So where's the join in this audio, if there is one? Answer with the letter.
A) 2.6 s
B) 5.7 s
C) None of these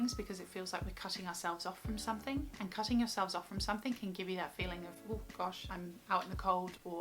B